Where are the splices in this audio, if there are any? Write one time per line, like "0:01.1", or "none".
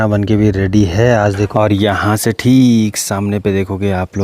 0:01.4